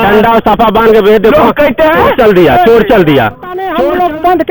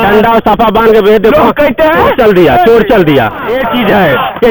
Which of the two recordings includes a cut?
first; 1 cut; at 3.5 s

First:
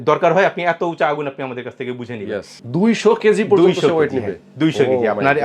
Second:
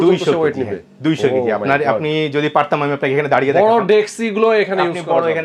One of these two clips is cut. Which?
first; 1 cut; at 2.6 s

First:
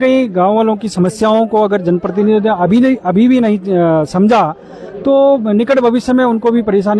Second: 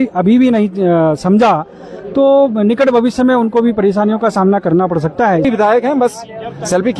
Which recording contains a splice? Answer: second; 1 cut; at 5.5 s

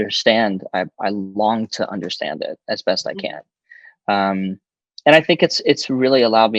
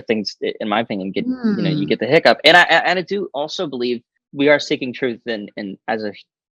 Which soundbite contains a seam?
second; 1 cut; at 4.2 s

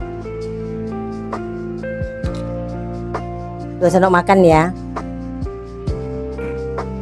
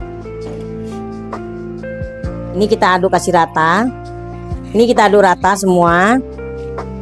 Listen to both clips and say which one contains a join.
second; 1 cut; at 2.5 s

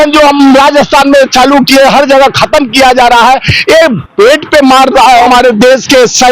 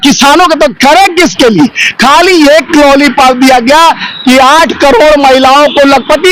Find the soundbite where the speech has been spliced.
first; 1 cut; at 5.2 s

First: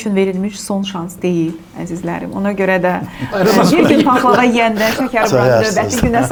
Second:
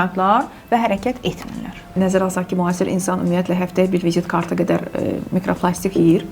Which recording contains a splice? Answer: second; 1 cut; at 2.0 s

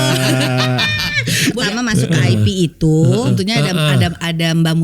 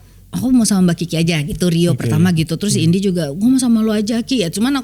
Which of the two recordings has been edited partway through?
first; 2 cuts; at 1.6 s, 3.3 s

